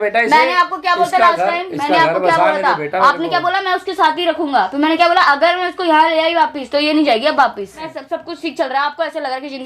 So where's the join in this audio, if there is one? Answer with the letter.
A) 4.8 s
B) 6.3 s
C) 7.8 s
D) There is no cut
C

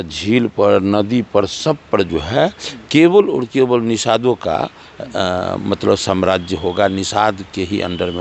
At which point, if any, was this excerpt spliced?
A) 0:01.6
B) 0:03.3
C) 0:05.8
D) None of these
D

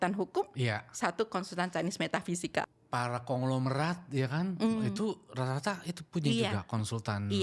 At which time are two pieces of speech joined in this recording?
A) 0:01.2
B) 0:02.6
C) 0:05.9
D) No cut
B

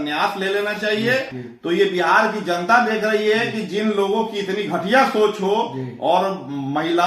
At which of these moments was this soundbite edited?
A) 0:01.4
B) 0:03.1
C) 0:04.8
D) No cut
A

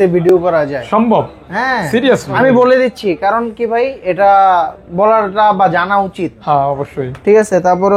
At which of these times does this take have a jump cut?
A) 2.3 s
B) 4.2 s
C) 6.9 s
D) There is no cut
A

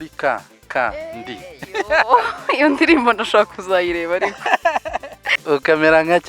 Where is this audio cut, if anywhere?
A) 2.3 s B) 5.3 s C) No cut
B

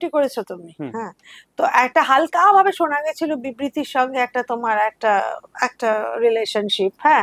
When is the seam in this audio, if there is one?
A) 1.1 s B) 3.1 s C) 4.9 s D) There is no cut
D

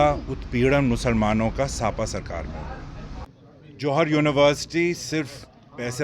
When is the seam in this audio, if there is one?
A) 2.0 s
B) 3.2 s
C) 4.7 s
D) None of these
B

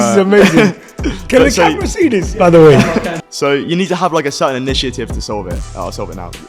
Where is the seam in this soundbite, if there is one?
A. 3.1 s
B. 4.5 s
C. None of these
A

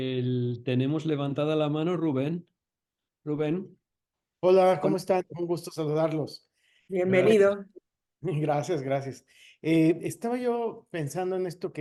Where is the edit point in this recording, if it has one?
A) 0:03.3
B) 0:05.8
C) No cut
C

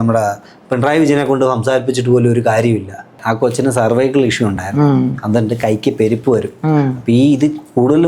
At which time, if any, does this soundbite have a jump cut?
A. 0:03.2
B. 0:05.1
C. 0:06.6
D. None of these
A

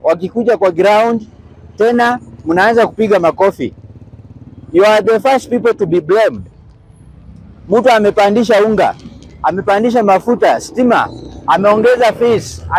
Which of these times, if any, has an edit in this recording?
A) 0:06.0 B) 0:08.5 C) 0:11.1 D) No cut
D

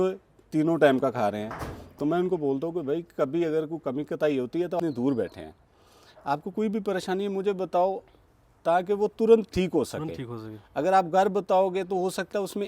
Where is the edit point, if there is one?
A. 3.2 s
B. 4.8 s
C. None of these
B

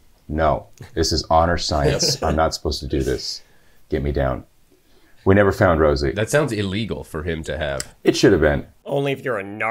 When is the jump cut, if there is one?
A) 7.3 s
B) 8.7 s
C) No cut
B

